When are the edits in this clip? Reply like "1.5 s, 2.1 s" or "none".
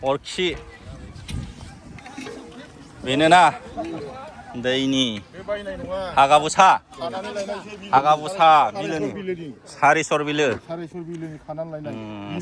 none